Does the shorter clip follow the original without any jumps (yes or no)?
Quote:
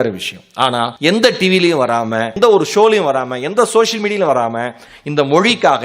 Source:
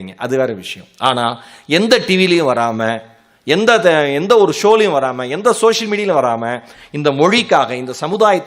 no